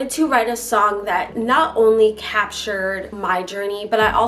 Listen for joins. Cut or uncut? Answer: cut